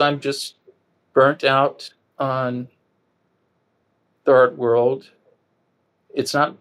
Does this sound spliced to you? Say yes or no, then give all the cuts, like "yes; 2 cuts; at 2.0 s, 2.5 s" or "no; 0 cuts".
no; 0 cuts